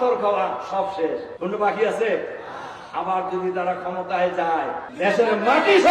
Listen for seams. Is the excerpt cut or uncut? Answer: cut